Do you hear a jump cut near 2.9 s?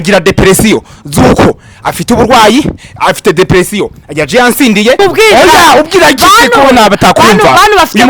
no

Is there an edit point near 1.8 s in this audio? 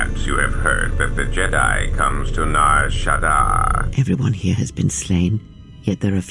no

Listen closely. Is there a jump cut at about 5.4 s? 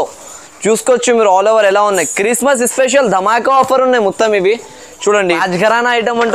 yes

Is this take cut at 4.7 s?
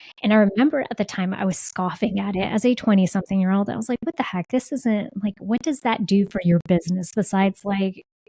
no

